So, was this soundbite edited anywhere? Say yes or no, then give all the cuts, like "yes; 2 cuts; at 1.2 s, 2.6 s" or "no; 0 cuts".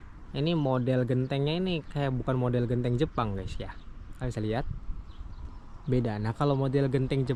no; 0 cuts